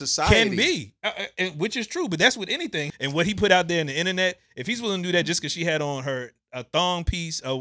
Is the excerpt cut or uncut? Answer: cut